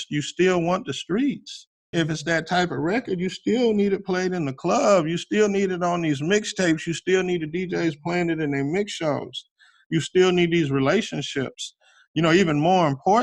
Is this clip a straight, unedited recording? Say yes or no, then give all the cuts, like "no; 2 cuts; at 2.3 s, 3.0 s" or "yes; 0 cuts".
no; 1 cut; at 1.9 s